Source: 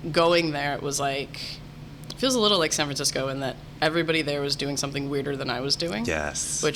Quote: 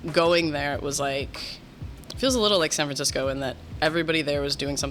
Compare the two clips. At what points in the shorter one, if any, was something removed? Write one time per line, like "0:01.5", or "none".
none